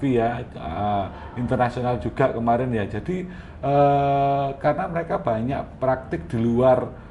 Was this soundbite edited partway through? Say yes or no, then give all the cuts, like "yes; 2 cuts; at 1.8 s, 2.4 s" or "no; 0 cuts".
no; 0 cuts